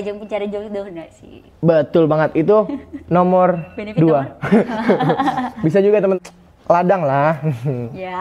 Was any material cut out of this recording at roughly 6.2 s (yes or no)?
yes